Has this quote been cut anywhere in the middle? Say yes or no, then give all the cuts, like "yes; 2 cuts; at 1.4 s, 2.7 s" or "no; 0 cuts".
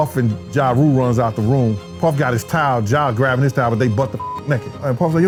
no; 0 cuts